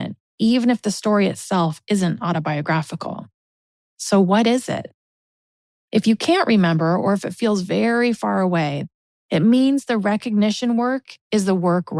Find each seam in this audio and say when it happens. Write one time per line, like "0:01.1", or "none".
0:08.8
0:11.1